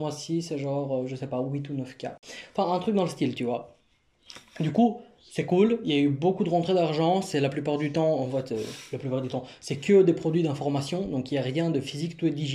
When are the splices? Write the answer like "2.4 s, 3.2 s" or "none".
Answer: none